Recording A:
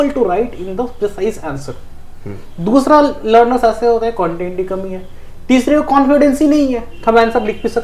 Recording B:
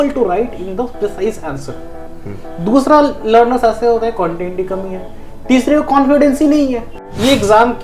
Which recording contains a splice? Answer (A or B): B